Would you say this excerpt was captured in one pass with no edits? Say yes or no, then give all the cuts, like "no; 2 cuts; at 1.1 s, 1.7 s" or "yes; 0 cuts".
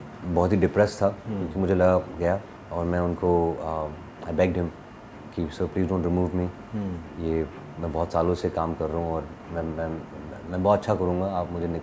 yes; 0 cuts